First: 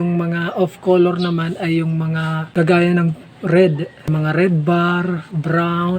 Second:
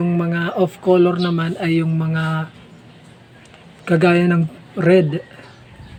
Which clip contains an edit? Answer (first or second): first